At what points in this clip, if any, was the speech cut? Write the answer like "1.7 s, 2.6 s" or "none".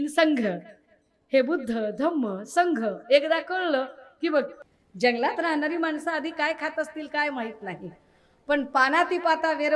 4.6 s